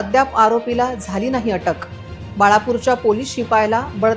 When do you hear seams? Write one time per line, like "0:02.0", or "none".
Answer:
none